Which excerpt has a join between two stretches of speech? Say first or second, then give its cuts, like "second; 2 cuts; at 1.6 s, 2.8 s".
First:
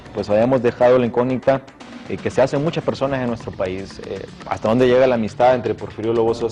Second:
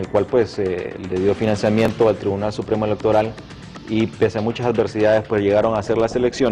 second; 1 cut; at 5.2 s